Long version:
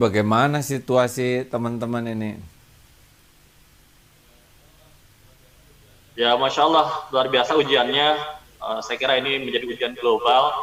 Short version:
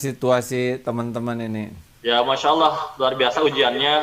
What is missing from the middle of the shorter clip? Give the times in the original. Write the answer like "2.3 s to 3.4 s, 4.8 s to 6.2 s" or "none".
2.5 s to 6.0 s